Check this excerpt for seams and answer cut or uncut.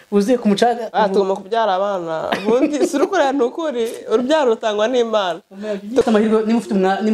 cut